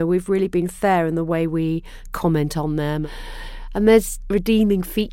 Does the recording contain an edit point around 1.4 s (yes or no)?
no